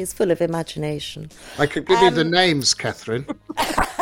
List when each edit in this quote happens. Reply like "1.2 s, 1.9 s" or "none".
none